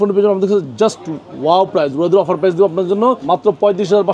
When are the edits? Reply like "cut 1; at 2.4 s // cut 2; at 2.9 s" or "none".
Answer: cut 1; at 3.2 s